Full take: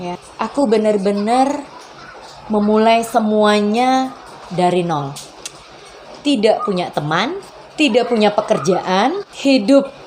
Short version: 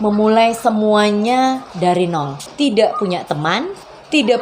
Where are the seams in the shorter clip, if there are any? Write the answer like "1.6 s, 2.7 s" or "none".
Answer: 1.7 s, 2.4 s